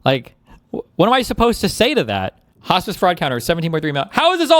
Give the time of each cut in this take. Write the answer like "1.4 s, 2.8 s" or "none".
2.4 s